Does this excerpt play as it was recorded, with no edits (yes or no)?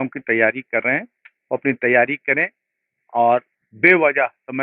yes